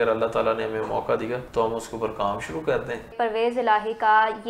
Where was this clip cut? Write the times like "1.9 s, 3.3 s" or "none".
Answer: 1.4 s, 3.1 s